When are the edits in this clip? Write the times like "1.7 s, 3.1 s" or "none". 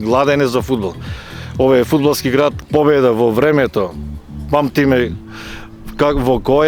2.6 s